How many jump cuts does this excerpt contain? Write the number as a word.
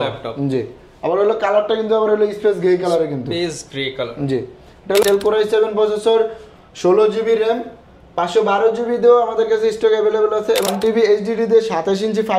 two